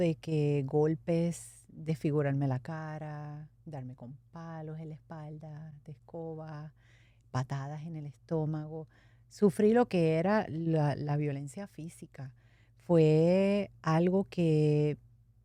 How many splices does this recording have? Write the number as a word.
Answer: zero